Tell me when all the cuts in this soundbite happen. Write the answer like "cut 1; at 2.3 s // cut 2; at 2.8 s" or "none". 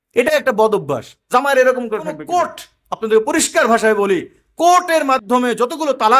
cut 1; at 2.2 s

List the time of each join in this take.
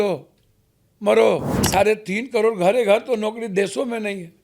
cut 1; at 1.7 s

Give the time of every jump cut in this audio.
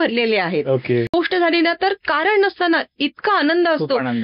cut 1; at 1.1 s

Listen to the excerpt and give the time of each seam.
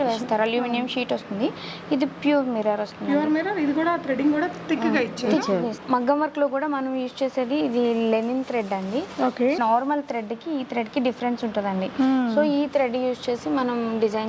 cut 1; at 5.8 s // cut 2; at 9.6 s

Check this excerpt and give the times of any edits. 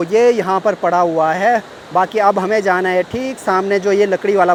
none

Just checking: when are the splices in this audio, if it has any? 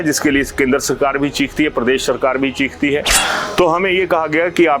cut 1; at 3.1 s

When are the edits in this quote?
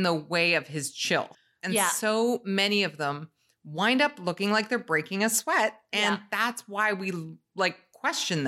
cut 1; at 1.4 s

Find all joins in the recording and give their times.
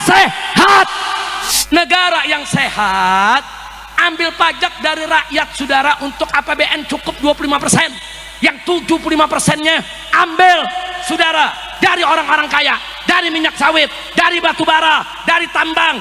cut 1; at 1.3 s

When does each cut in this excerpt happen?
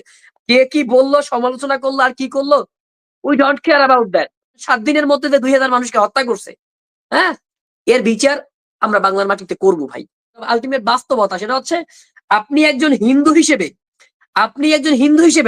cut 1; at 4.7 s // cut 2; at 10.3 s

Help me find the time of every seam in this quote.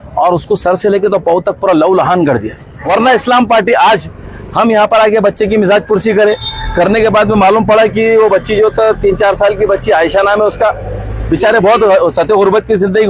cut 1; at 2.8 s

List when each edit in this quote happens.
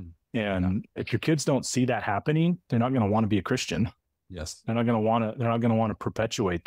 cut 1; at 2.6 s

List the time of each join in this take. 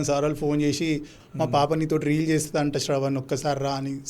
cut 1; at 1.1 s

